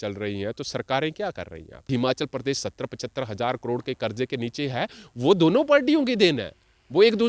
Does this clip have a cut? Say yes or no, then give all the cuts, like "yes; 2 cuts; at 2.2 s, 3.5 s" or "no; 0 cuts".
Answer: yes; 1 cut; at 1.9 s